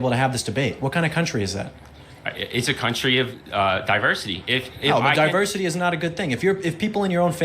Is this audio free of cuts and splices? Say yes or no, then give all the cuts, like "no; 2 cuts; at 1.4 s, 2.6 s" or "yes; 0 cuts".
no; 1 cut; at 1.1 s